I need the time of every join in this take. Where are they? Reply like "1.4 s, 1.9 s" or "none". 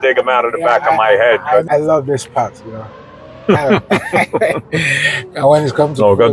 1.7 s